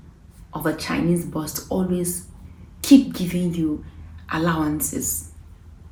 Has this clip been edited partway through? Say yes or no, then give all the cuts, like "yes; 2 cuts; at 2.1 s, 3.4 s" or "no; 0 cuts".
no; 0 cuts